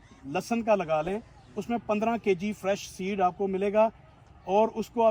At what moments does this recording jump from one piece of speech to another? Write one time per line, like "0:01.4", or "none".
none